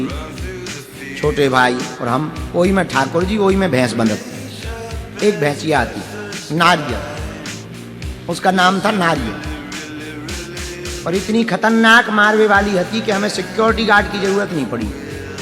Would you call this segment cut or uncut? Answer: cut